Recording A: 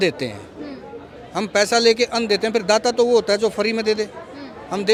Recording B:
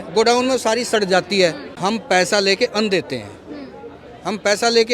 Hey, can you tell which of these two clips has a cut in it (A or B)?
B